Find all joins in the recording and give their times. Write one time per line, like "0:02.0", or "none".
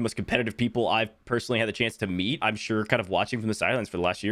0:02.4